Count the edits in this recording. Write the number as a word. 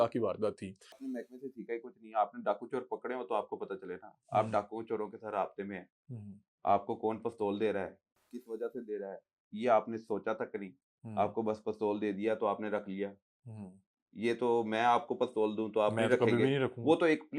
one